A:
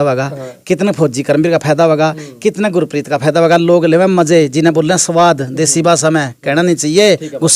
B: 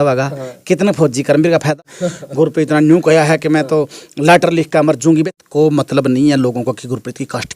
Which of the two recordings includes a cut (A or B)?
B